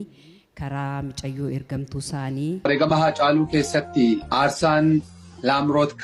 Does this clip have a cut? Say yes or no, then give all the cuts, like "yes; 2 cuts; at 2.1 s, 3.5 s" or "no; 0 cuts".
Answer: yes; 1 cut; at 2.6 s